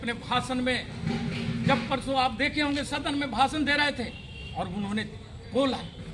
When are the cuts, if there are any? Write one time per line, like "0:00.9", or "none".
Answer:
none